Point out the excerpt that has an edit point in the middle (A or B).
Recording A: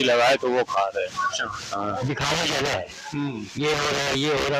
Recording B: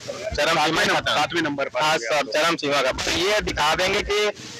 A